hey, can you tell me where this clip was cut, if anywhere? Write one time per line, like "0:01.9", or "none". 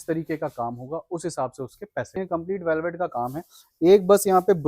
0:02.2